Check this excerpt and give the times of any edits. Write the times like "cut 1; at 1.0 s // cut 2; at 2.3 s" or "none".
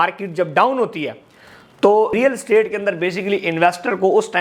cut 1; at 2.1 s

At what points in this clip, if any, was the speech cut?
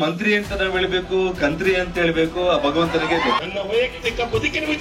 cut 1; at 3.4 s

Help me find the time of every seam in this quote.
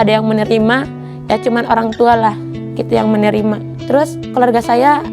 cut 1; at 3.7 s

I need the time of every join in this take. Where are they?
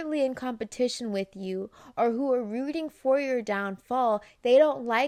none

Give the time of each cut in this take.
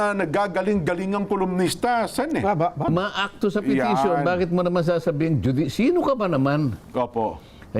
cut 1; at 2.9 s

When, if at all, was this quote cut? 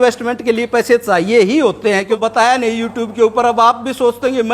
cut 1; at 2.2 s

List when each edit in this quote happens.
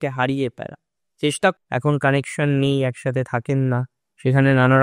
cut 1; at 1.5 s

